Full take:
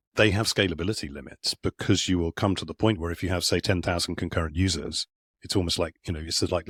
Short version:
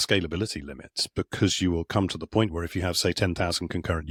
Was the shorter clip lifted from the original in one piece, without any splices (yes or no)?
yes